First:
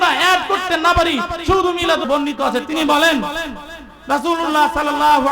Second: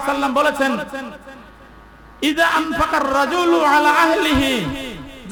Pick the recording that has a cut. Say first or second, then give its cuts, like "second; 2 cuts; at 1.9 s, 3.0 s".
first; 1 cut; at 2.1 s